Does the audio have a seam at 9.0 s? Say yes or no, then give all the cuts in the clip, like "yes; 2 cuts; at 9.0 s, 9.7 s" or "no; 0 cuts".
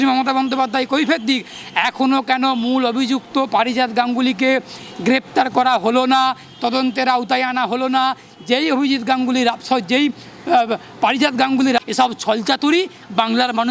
no; 1 cut; at 11.9 s